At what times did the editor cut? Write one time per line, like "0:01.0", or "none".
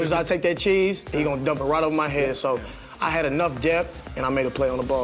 0:04.1